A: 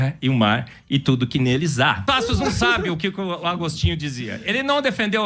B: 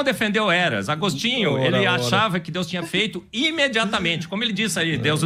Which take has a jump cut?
A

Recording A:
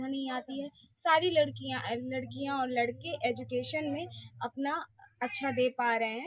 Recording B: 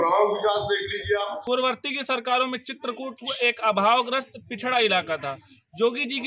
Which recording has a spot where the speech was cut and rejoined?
B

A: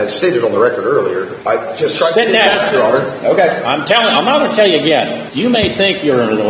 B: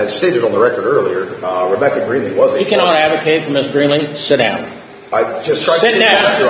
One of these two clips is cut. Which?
A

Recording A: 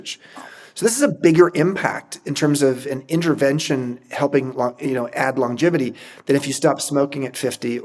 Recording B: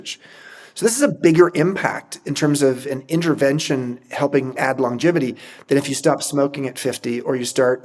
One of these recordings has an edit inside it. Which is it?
B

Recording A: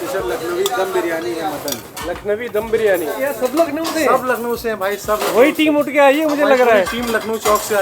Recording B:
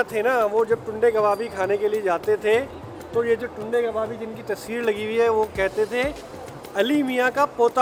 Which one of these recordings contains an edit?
A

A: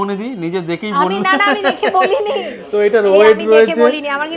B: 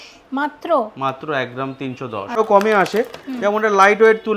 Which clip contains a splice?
B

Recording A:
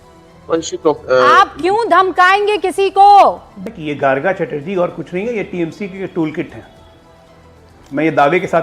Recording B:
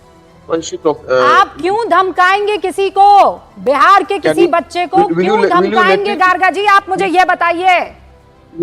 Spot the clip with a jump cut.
A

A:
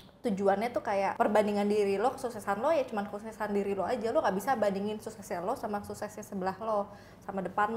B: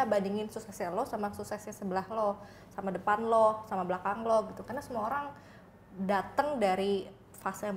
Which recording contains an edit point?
A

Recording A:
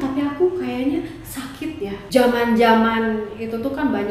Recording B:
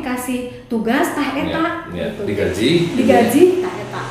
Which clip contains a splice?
A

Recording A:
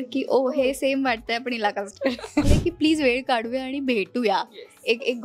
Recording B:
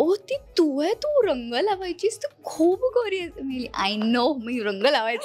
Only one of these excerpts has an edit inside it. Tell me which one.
A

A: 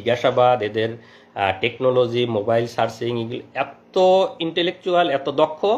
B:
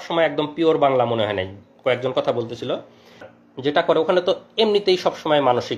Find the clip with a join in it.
B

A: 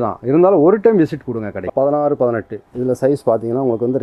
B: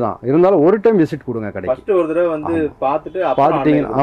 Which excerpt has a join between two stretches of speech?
A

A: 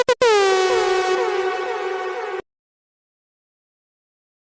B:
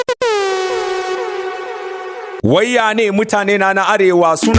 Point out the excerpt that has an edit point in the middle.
B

